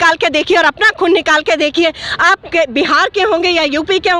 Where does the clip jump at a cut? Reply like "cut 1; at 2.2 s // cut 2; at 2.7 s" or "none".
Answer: none